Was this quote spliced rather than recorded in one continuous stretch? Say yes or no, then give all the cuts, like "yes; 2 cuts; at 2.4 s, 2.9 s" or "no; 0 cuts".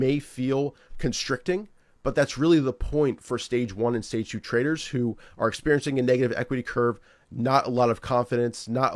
no; 0 cuts